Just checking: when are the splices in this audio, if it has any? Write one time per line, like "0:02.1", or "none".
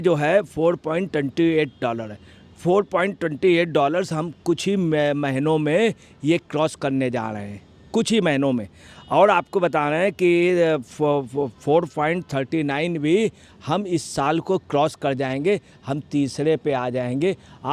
none